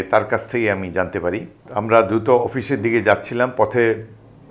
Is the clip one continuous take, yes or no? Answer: no